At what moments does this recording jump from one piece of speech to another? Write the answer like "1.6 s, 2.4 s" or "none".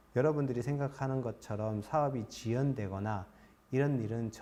none